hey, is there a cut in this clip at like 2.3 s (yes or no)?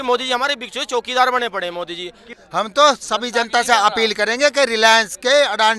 yes